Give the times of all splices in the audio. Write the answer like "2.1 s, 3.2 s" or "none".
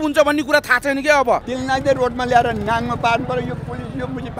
1.5 s